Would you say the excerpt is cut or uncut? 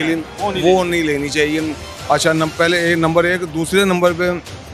uncut